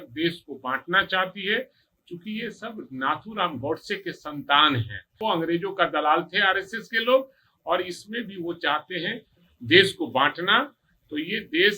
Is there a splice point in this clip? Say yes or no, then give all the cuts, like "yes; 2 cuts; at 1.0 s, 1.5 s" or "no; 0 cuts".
yes; 1 cut; at 5.2 s